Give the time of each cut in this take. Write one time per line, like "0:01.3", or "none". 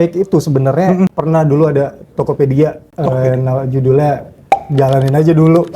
0:01.1
0:02.9
0:04.6